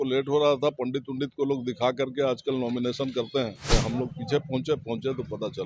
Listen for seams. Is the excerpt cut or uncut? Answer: cut